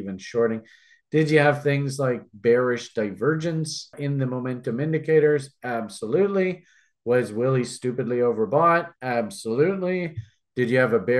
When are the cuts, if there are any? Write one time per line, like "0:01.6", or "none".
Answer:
0:03.9